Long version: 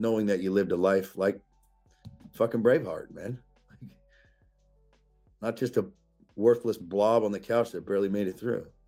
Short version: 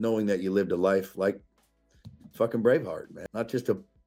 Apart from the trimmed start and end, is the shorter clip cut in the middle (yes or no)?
yes